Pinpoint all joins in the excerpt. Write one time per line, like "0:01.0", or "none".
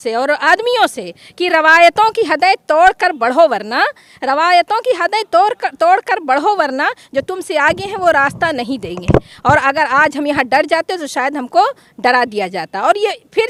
none